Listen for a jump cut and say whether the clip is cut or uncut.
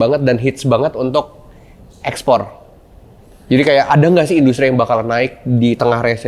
uncut